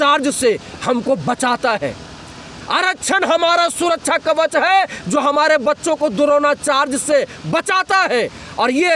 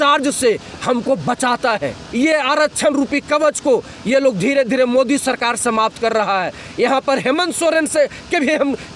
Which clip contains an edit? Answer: second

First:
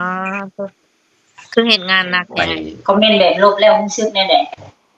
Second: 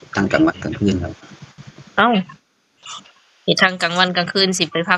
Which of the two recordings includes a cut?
first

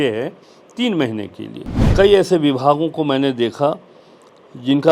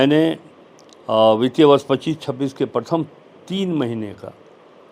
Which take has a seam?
first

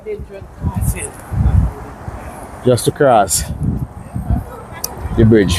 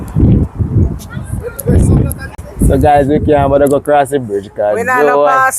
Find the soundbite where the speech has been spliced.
second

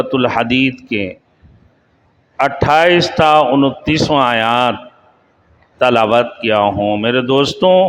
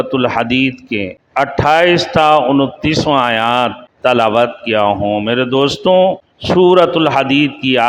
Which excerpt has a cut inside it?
second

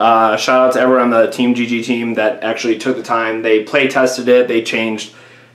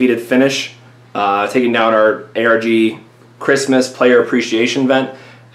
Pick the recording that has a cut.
second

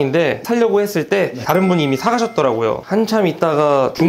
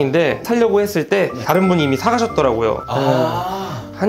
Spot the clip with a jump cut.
first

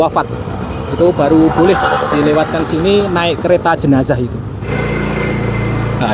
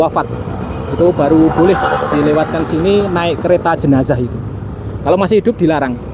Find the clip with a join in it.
first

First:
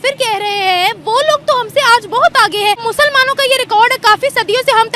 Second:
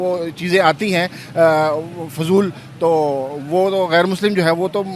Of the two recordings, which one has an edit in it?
first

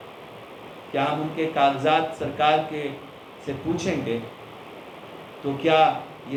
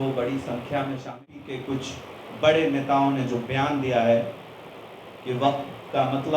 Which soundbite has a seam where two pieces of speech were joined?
second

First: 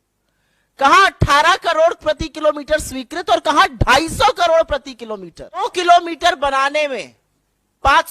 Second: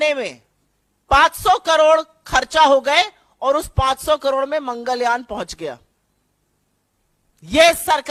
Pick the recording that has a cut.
first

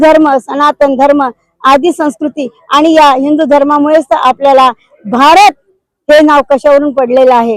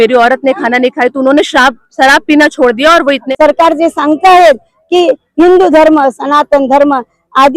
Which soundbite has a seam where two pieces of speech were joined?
second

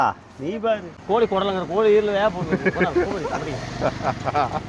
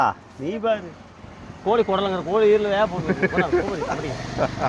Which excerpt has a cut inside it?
first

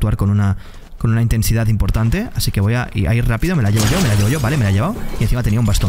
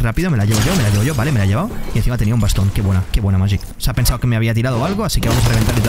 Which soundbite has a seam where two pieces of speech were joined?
second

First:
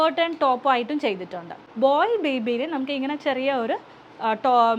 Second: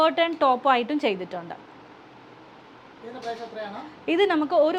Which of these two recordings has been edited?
first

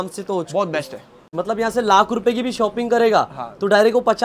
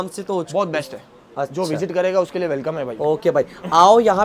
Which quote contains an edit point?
first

